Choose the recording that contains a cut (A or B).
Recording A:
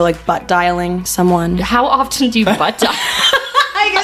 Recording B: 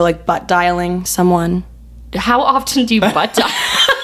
A